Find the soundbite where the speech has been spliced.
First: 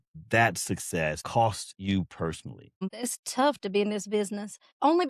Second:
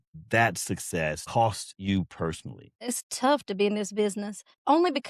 second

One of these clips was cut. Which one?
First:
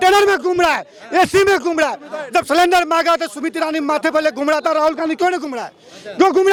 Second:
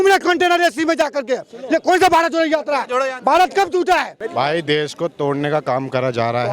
second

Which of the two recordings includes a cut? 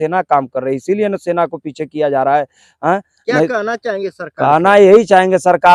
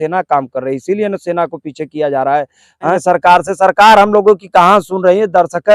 second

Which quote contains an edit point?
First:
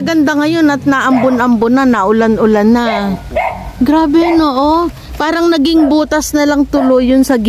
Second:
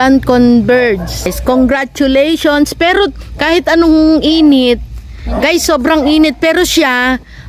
second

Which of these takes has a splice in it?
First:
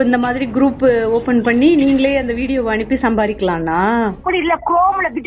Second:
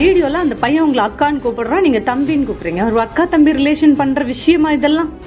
first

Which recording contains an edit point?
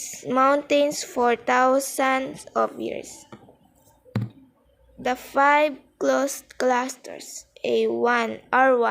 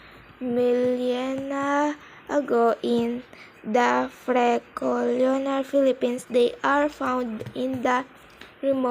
second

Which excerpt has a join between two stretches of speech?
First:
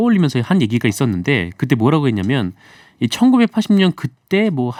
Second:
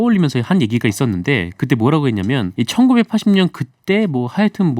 second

